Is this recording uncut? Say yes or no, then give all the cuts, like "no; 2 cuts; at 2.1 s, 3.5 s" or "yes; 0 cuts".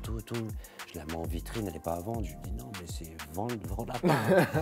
yes; 0 cuts